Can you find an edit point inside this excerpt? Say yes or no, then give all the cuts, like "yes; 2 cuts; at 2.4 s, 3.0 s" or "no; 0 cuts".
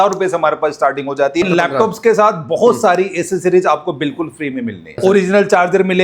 yes; 2 cuts; at 1.4 s, 5.0 s